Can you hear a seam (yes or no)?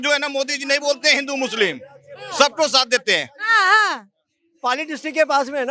no